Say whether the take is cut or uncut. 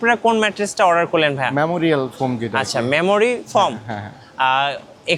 uncut